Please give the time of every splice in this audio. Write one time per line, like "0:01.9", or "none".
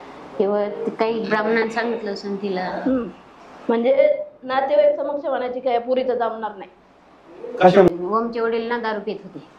0:07.9